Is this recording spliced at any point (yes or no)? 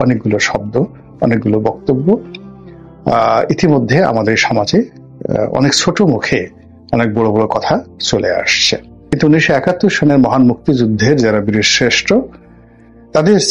yes